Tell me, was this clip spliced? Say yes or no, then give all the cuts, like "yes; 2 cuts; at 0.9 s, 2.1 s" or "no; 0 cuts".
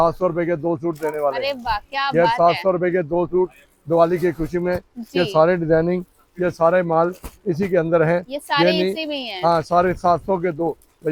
no; 0 cuts